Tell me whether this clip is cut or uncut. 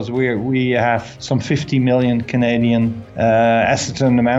cut